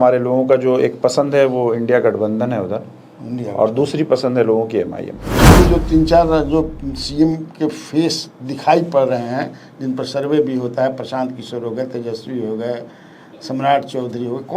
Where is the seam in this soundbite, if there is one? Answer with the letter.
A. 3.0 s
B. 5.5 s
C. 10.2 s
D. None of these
B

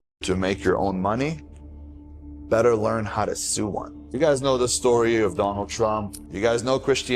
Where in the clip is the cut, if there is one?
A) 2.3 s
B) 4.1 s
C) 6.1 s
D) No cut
B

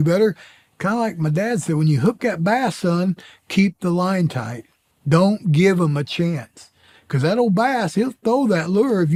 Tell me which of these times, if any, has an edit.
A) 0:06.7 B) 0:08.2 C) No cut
C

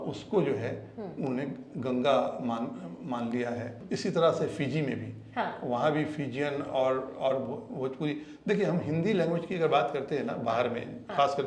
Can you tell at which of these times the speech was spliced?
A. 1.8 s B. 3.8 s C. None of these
B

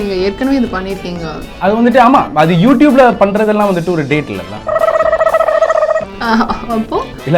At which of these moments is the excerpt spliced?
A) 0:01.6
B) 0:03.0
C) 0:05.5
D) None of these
A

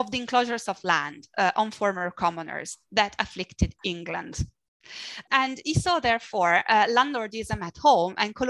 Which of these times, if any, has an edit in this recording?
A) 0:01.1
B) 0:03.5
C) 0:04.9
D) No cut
D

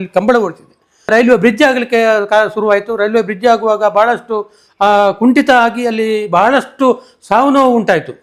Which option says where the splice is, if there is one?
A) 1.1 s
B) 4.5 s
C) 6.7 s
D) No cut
A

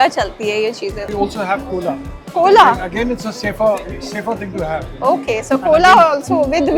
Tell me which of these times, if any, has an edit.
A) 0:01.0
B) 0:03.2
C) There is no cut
A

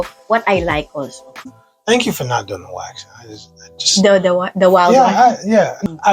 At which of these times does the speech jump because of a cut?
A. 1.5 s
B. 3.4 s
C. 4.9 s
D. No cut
A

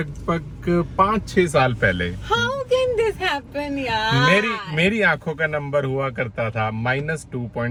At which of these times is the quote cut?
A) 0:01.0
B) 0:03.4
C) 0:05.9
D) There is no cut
D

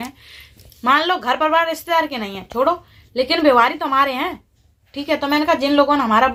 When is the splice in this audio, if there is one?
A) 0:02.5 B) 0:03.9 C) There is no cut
C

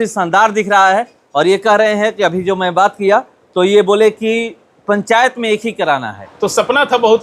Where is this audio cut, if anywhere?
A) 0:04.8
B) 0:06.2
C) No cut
B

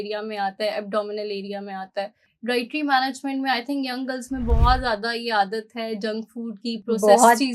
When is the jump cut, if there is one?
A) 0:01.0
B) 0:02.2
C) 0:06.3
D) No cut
B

